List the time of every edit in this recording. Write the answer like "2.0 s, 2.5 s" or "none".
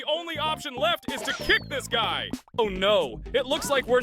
2.6 s